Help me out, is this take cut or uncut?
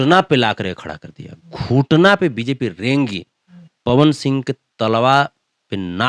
uncut